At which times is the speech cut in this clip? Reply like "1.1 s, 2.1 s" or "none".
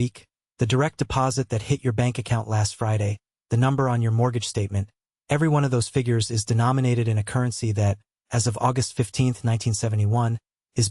none